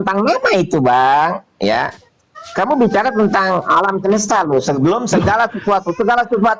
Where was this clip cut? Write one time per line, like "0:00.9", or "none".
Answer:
none